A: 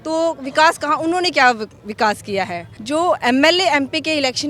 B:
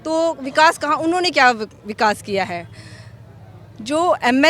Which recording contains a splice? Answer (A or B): A